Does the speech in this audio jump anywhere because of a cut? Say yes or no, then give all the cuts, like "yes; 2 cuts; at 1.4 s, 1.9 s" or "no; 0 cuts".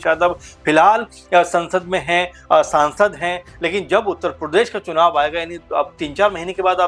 no; 0 cuts